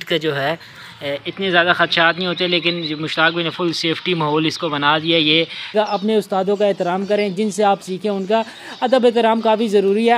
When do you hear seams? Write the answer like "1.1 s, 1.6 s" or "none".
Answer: 5.7 s